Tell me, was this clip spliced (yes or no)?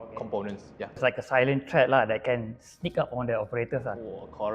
yes